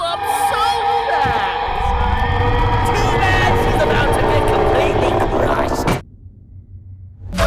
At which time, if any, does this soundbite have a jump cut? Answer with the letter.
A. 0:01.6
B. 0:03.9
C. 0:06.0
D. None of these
C